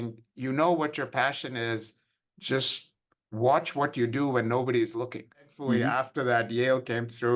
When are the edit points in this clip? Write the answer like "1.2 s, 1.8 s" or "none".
5.9 s

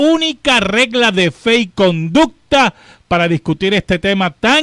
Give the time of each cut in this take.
3.6 s

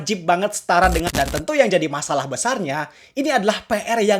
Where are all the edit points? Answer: 1.1 s

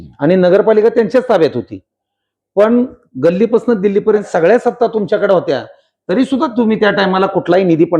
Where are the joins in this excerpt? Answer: 4.3 s

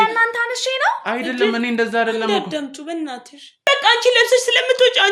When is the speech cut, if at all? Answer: 3.5 s

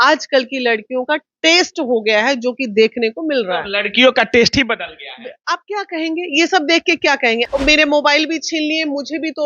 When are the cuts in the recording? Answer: 7.5 s

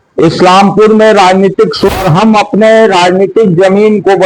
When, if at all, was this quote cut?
1.9 s

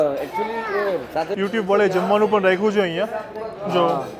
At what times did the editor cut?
1.3 s

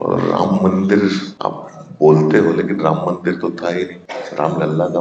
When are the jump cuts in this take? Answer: 1.3 s, 4.1 s

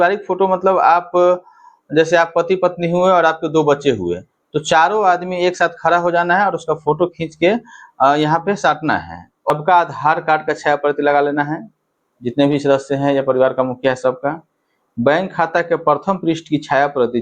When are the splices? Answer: 9.5 s

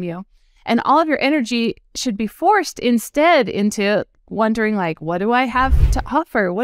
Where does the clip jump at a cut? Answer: none

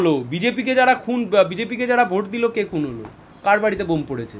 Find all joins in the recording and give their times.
none

